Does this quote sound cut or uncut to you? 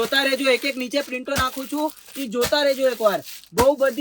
uncut